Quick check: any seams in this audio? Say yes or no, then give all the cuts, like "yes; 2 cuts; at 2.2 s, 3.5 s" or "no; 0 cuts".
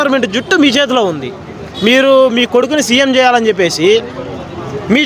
no; 0 cuts